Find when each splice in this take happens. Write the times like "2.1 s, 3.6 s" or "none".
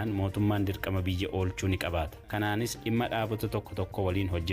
2.2 s